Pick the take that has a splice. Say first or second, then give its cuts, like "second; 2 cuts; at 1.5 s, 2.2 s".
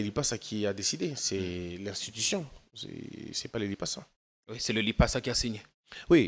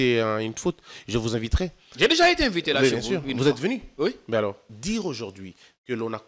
second; 1 cut; at 4.7 s